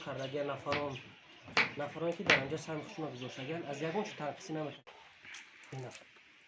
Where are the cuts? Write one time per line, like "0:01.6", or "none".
0:04.8